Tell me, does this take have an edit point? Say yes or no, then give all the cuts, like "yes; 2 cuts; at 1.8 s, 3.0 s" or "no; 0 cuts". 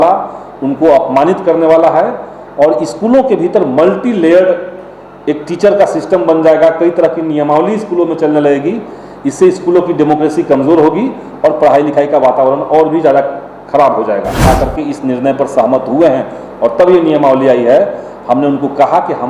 yes; 1 cut; at 14.4 s